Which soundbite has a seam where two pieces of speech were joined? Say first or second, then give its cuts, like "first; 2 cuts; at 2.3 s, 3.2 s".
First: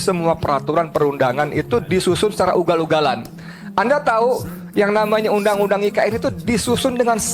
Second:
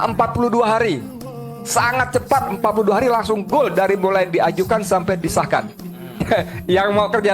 second; 1 cut; at 6.2 s